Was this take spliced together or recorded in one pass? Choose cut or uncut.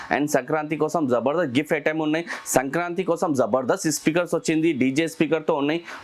uncut